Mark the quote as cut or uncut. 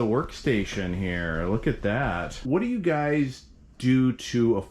cut